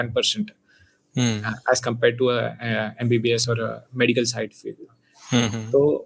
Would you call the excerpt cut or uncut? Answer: uncut